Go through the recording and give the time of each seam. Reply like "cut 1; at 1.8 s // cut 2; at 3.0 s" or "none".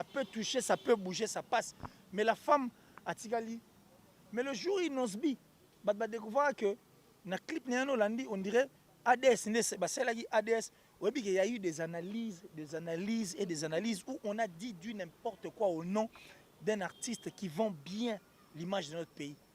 cut 1; at 4.1 s